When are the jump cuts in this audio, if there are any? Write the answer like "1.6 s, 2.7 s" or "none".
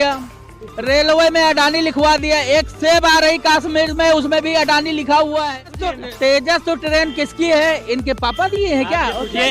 6.0 s